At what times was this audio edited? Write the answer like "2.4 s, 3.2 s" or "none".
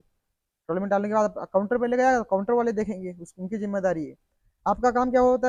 none